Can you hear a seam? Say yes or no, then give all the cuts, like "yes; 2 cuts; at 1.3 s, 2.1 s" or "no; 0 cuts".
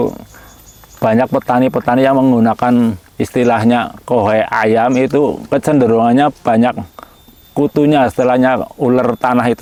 no; 0 cuts